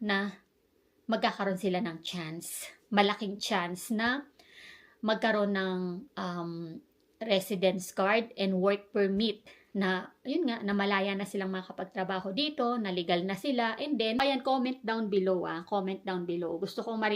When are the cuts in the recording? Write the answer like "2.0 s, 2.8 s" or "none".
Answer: 14.2 s